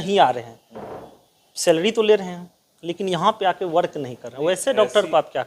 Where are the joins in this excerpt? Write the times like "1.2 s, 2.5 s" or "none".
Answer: none